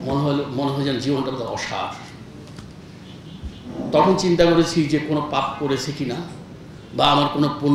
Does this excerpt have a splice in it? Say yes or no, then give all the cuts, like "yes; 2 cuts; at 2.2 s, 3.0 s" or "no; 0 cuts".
no; 0 cuts